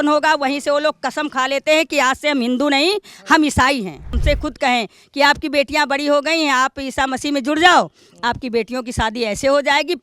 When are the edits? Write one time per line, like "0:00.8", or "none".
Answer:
0:04.2